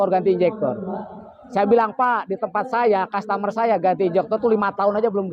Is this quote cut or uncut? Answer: uncut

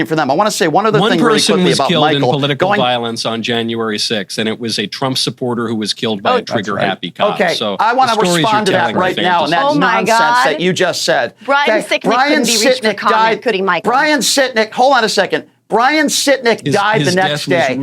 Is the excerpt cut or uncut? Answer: cut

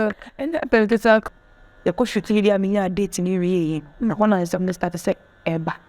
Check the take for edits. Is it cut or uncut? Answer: cut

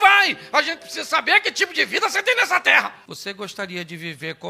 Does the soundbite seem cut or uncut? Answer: cut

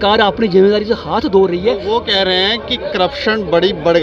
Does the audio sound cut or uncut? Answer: uncut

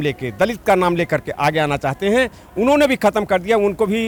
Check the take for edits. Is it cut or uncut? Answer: uncut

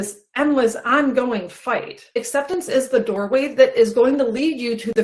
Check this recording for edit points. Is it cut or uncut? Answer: cut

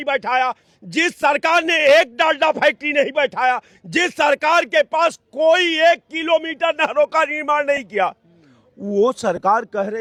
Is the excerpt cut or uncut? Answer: uncut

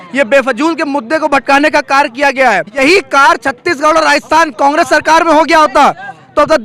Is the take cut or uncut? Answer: cut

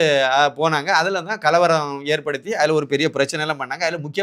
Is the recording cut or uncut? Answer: uncut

